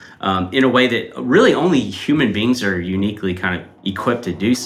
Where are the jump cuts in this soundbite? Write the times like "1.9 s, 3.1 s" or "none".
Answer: 3.7 s